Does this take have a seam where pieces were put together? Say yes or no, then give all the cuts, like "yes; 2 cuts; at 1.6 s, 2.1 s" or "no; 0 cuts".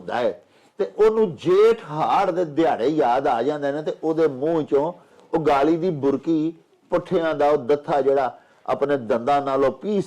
no; 0 cuts